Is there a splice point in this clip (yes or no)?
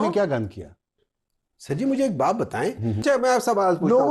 yes